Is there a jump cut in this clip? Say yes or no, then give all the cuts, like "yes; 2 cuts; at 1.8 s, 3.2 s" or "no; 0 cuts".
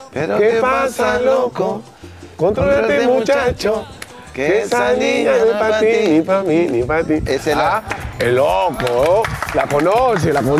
no; 0 cuts